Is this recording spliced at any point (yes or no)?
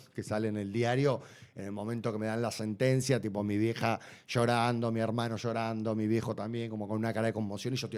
no